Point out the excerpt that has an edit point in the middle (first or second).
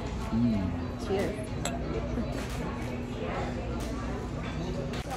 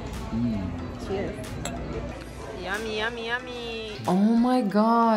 second